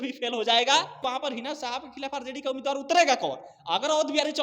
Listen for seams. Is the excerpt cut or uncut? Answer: cut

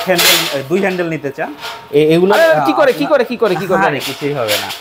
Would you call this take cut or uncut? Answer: uncut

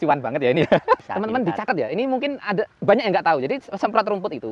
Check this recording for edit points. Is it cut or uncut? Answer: cut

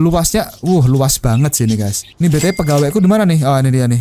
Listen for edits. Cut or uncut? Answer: cut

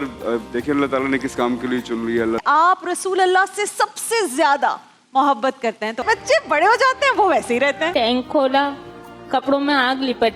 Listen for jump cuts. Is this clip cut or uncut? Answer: cut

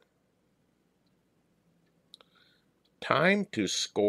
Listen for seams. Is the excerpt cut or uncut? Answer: cut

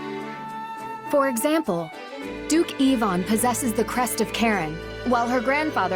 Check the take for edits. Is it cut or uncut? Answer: cut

